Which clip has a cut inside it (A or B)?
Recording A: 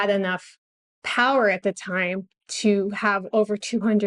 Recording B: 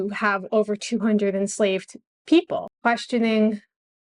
B